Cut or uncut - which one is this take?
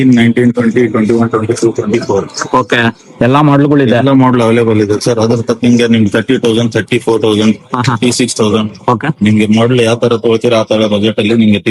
uncut